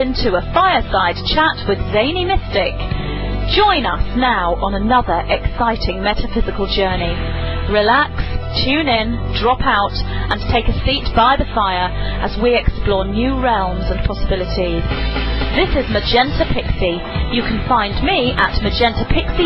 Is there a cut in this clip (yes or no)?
no